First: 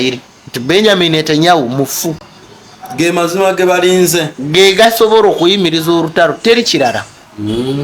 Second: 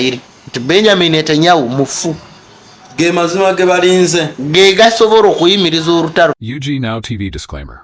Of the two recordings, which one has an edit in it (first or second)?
second